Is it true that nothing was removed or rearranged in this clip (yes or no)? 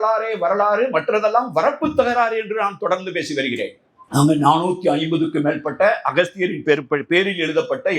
no